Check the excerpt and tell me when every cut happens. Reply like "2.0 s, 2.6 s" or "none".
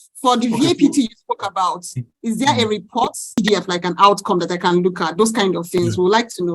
3.4 s